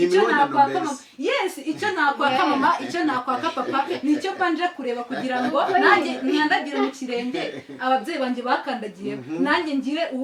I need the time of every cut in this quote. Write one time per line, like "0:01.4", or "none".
none